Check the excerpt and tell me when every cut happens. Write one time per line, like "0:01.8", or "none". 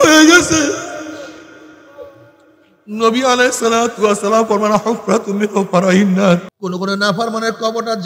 0:06.5